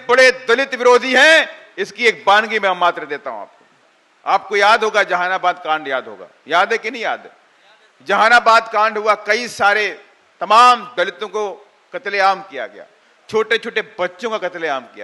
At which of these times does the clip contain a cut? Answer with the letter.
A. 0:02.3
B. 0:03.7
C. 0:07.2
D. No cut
D